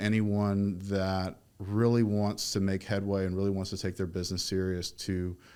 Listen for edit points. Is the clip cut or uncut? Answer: uncut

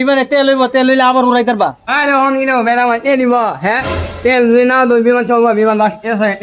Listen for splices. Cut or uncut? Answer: cut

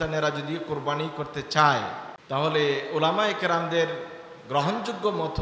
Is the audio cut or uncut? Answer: cut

